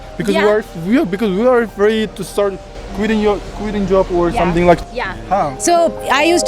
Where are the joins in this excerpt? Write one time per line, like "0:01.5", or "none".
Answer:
0:04.8